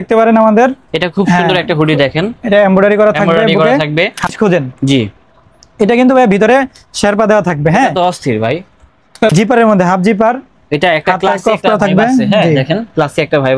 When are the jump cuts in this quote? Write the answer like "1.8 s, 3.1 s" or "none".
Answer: 4.3 s, 9.3 s